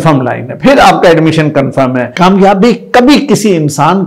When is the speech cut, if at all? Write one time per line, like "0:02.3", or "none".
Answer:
0:02.0